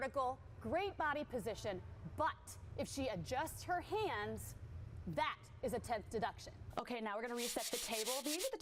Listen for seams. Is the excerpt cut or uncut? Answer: cut